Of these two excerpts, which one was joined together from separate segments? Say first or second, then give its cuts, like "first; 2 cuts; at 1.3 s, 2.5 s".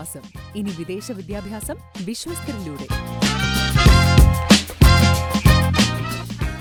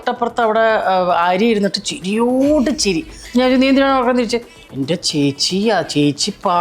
second; 1 cut; at 3.2 s